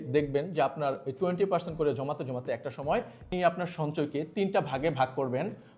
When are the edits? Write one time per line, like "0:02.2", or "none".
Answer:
0:03.2